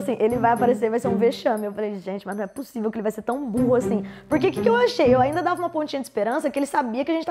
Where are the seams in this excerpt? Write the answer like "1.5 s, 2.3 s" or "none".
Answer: none